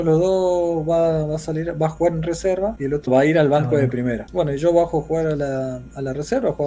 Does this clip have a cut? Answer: yes; 2 cuts; at 3.1 s, 4.2 s

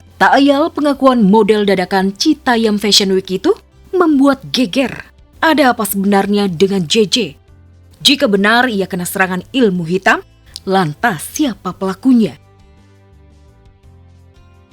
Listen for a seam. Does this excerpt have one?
yes; 1 cut; at 12.4 s

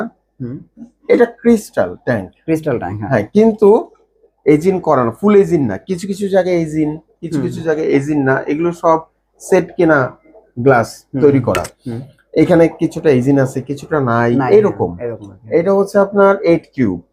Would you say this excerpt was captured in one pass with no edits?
yes; 0 cuts

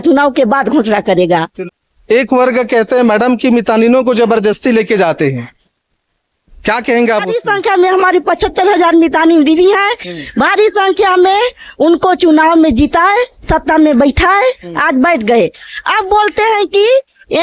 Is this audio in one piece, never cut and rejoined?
no; 2 cuts; at 1.7 s, 7.4 s

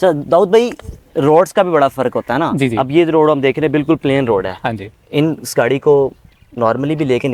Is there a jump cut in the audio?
no; 0 cuts

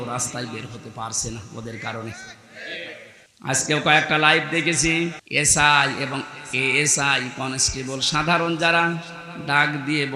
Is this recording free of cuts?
no; 2 cuts; at 3.2 s, 5.2 s

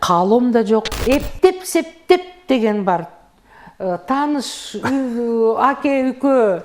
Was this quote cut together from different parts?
yes; 1 cut; at 1.0 s

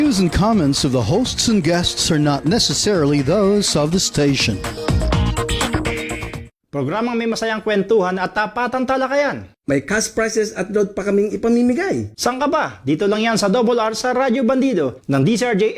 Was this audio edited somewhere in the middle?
yes; 1 cut; at 6.7 s

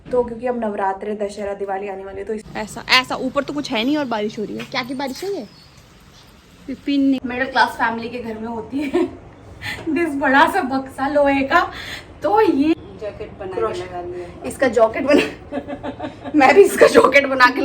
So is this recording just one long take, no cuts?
no; 3 cuts; at 2.4 s, 7.2 s, 12.8 s

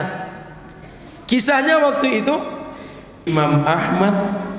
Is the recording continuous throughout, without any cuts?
no; 1 cut; at 3.3 s

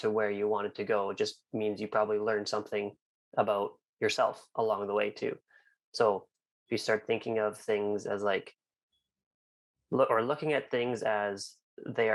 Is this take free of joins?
yes; 0 cuts

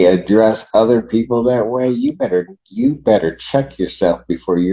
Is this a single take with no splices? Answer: yes; 0 cuts

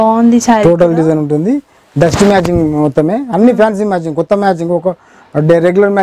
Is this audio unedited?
yes; 0 cuts

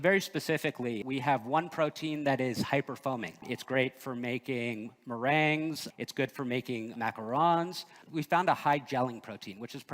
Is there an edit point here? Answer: yes; 5 cuts; at 1.0 s, 3.5 s, 5.8 s, 6.9 s, 7.9 s

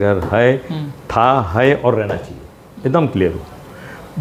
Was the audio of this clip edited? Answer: no; 0 cuts

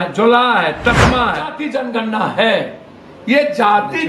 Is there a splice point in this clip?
yes; 1 cut; at 1.6 s

